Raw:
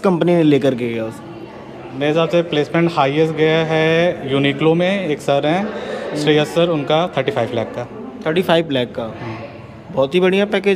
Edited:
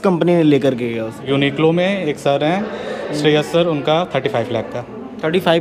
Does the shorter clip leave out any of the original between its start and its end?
yes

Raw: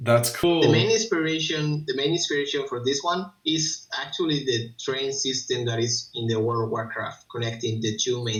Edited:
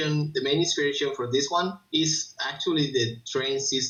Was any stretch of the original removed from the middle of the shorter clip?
no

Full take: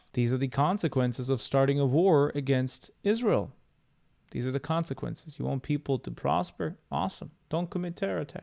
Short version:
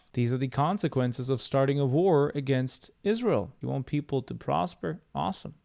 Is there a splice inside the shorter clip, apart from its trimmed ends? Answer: yes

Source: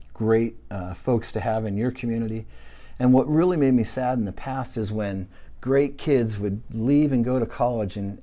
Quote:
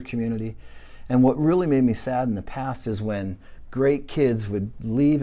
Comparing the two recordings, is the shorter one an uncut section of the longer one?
yes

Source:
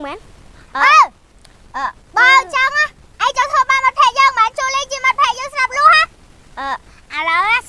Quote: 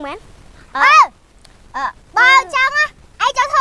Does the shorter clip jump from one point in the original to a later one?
no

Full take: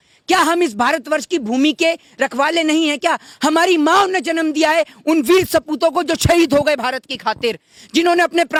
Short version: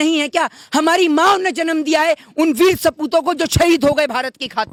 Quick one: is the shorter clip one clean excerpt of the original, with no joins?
yes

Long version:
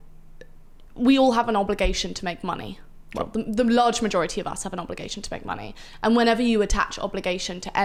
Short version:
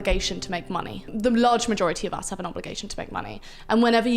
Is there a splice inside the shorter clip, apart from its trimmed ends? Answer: yes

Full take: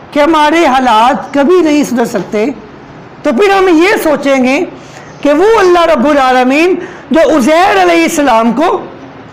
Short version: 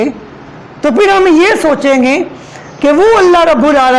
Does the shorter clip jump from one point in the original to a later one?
no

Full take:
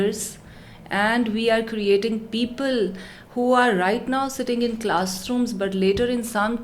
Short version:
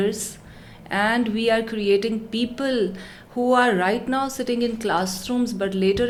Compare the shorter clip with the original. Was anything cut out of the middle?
no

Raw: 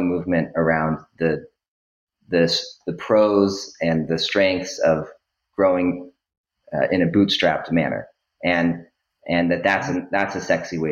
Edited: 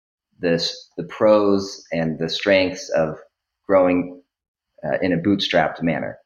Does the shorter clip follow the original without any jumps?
yes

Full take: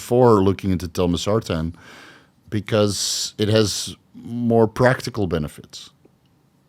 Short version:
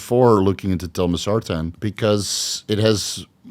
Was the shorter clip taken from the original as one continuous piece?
no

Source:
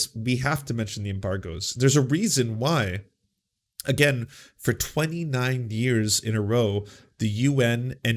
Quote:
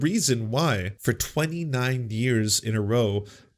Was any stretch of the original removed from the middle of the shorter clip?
yes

